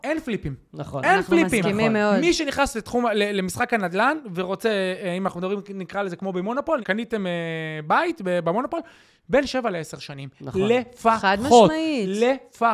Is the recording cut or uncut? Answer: cut